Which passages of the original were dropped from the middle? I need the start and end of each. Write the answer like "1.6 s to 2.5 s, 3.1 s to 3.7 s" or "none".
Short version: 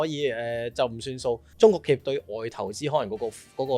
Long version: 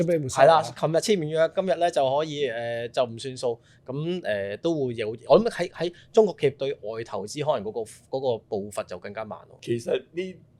3.7 s to 6.0 s